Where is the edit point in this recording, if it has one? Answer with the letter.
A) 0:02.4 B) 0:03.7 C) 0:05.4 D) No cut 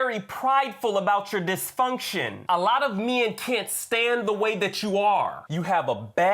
C